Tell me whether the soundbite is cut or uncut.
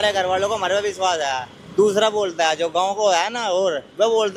uncut